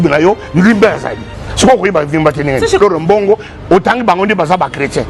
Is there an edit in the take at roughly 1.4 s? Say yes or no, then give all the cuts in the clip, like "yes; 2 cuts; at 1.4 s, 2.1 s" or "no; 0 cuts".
no; 1 cut; at 2.8 s